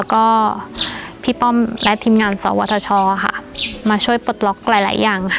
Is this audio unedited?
yes; 0 cuts

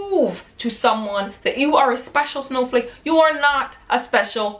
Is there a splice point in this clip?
no; 0 cuts

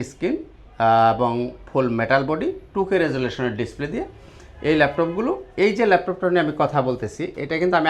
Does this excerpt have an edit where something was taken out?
no; 0 cuts

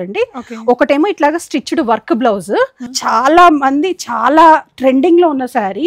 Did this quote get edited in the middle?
yes; 1 cut; at 2.9 s

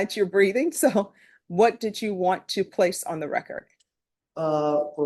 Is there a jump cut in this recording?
no; 0 cuts

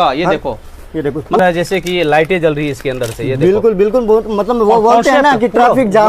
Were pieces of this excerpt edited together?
yes; 1 cut; at 1.4 s

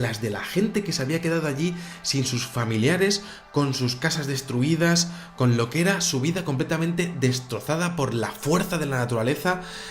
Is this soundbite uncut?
no; 1 cut; at 3.3 s

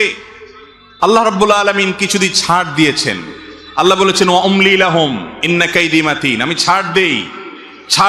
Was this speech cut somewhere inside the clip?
no; 0 cuts

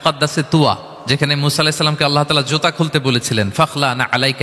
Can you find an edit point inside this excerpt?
yes; 1 cut; at 0.9 s

